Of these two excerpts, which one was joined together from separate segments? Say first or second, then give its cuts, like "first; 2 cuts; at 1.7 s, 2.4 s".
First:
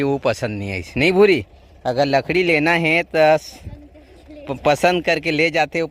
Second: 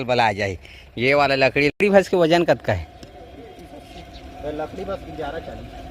second; 1 cut; at 1.8 s